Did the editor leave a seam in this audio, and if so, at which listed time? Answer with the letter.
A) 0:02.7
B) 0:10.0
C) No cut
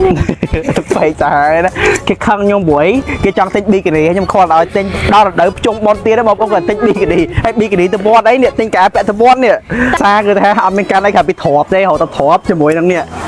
B